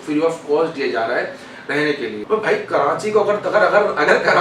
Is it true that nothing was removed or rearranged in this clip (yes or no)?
no